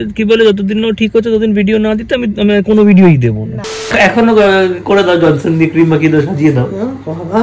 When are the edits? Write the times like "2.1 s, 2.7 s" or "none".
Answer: 3.9 s